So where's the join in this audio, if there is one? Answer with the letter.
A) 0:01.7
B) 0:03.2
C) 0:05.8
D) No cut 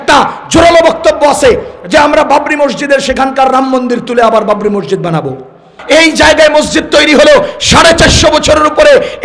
C